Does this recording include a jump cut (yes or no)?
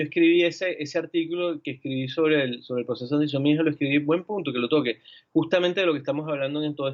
no